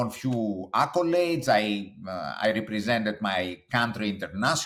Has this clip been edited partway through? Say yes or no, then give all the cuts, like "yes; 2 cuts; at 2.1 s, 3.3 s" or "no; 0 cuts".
no; 0 cuts